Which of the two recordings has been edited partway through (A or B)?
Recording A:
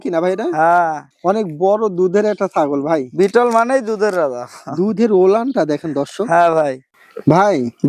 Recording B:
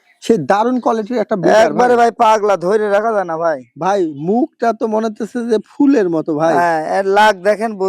A